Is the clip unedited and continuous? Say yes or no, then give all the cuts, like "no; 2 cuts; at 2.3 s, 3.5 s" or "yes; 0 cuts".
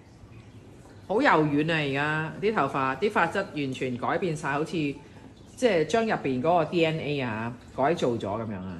yes; 0 cuts